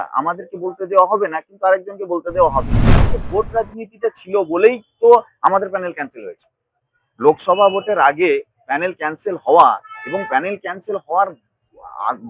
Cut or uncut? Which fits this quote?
cut